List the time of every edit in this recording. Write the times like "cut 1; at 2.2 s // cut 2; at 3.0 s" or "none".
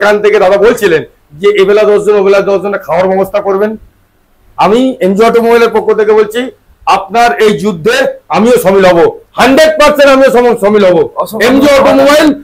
none